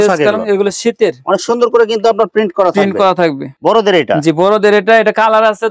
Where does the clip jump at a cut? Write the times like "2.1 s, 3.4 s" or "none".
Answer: 3.5 s